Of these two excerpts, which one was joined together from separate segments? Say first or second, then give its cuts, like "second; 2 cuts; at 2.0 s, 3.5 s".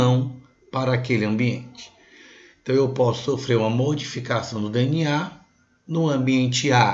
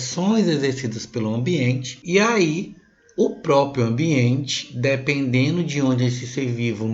second; 1 cut; at 1.9 s